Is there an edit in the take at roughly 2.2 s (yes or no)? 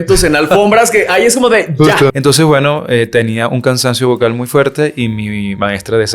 yes